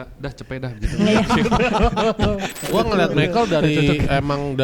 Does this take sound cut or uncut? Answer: cut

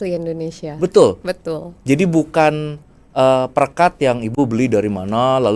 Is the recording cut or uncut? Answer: uncut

